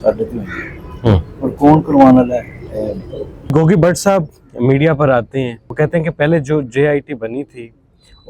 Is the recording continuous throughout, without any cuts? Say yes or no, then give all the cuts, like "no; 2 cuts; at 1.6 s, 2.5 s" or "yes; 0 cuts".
no; 2 cuts; at 3.5 s, 5.6 s